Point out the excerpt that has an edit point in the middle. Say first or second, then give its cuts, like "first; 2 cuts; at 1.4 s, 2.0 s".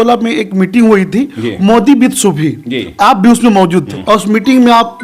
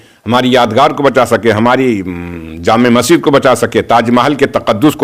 first; 1 cut; at 3.9 s